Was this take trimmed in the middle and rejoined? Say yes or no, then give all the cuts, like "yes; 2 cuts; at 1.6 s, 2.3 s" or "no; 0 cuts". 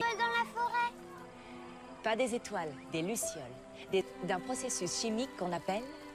no; 0 cuts